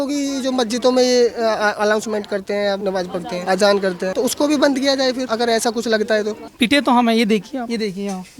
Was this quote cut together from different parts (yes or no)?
yes